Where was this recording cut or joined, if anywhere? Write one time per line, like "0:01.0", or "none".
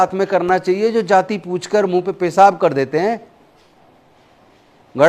none